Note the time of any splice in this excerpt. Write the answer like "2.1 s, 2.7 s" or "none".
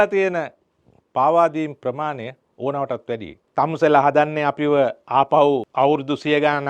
3.4 s, 5.7 s